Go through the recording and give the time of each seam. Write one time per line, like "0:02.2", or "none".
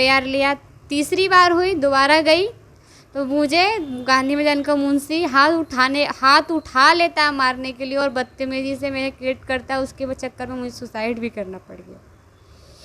none